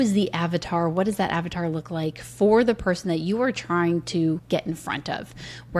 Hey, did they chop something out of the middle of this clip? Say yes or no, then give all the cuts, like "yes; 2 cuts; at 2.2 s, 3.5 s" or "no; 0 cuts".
yes; 1 cut; at 4.4 s